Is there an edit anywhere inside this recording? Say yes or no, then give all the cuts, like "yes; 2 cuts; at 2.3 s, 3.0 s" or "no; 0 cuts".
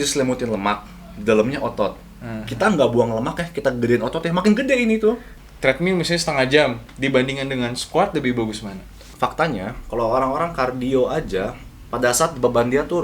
yes; 2 cuts; at 5.3 s, 9.1 s